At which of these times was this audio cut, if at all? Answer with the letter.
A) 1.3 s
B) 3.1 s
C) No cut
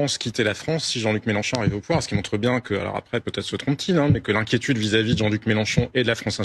C